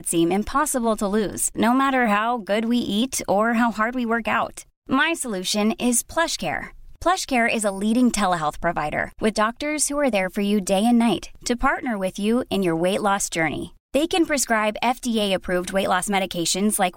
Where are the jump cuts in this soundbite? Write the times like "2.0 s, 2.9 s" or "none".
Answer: none